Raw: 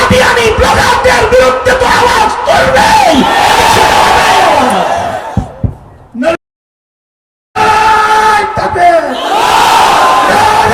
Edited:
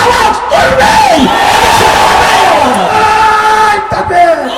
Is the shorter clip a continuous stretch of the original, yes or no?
no